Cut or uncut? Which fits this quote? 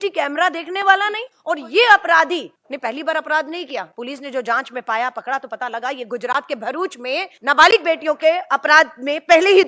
cut